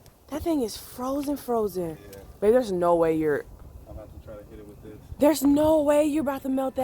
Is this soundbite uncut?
no; 1 cut; at 5.8 s

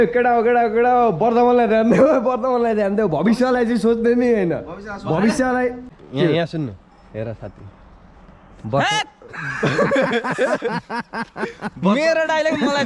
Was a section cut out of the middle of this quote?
yes; 1 cut; at 6.0 s

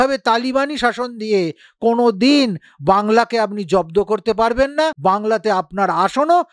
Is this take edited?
yes; 1 cut; at 5.0 s

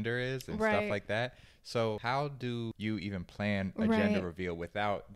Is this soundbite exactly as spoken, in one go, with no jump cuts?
no; 1 cut; at 2.3 s

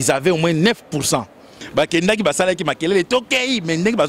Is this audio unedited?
no; 1 cut; at 1.6 s

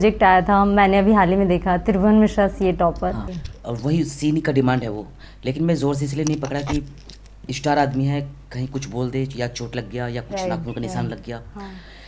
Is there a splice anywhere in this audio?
yes; 1 cut; at 3.3 s

